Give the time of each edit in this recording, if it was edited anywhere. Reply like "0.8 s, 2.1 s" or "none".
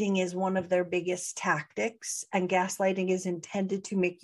none